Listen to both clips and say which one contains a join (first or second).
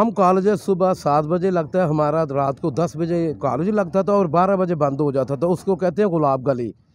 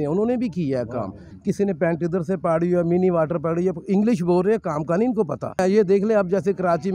second